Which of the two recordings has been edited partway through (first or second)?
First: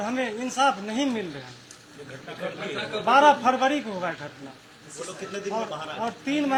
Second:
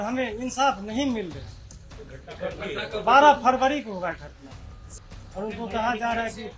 second